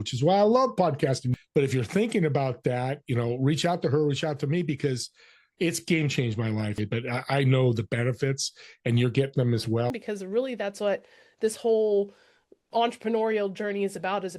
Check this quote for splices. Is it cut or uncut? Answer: cut